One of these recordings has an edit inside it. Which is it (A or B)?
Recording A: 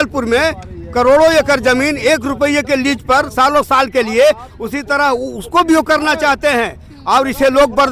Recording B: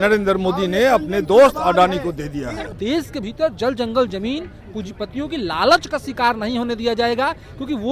B